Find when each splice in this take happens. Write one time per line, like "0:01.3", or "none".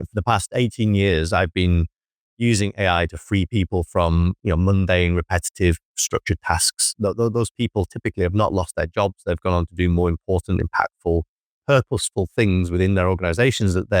none